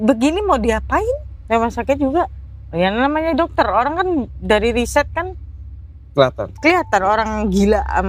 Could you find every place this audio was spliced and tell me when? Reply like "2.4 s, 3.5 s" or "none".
1.3 s